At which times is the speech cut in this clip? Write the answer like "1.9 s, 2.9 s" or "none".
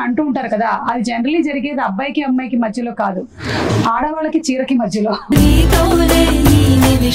5.3 s